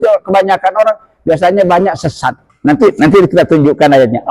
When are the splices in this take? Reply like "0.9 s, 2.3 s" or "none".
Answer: 2.5 s